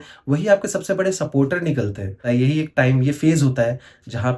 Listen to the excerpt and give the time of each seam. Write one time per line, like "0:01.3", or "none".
0:02.2